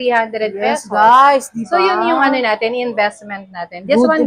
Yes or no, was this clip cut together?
no